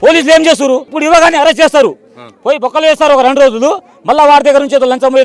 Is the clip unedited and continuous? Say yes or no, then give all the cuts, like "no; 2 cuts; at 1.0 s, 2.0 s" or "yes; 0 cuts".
no; 1 cut; at 0.9 s